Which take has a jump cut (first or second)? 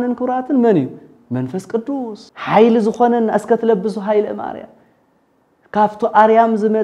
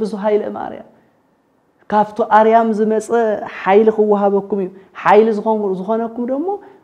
first